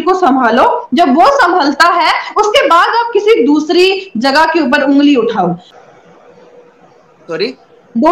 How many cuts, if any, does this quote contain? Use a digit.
1